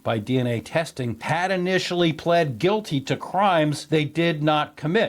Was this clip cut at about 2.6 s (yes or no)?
no